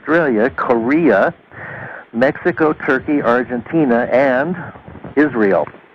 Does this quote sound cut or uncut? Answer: cut